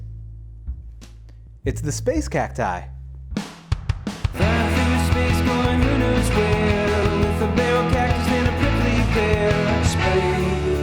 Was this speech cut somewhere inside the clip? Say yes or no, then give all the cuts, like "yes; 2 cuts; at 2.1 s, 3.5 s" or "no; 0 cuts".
yes; 1 cut; at 3.3 s